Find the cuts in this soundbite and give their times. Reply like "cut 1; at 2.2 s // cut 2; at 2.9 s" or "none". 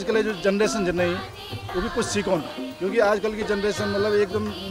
cut 1; at 2.6 s

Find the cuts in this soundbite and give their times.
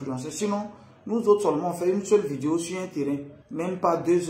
cut 1; at 3.4 s

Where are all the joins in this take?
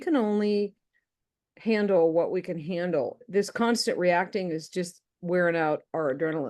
cut 1; at 3.2 s

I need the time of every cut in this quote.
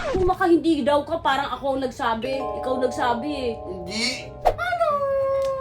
cut 1; at 4.4 s

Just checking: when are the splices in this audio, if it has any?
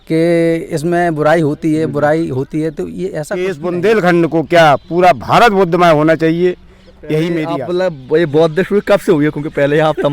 cut 1; at 3.3 s // cut 2; at 7.6 s

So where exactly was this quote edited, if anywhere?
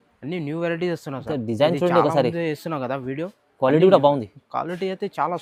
none

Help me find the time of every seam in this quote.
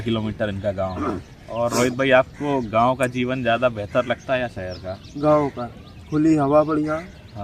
cut 1; at 1.3 s

